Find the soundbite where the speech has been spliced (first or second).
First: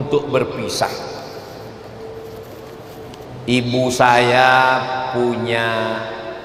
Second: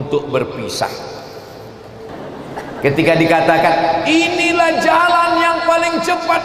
second